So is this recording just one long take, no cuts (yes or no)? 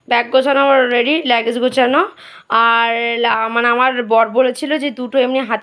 yes